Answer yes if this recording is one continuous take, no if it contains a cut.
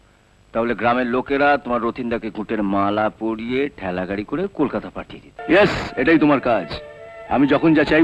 no